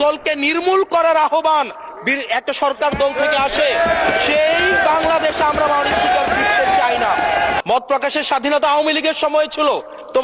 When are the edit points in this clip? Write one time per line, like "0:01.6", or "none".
0:07.6